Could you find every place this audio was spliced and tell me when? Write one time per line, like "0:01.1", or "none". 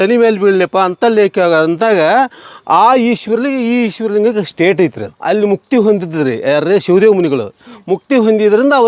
0:05.1

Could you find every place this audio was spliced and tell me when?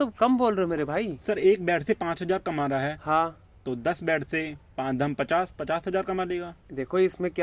none

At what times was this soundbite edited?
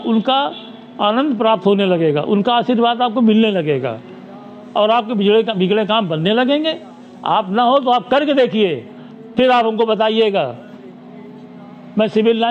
none

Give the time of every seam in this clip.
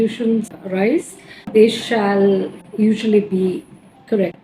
0:02.6

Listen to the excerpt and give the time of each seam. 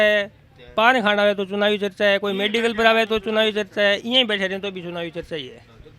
none

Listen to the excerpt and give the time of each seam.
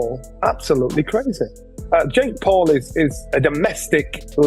none

